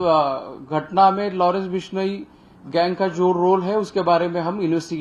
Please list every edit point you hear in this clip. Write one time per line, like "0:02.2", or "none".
none